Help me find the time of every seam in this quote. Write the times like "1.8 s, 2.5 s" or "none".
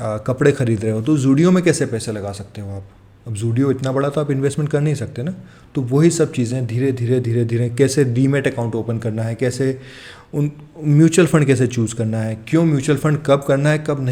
none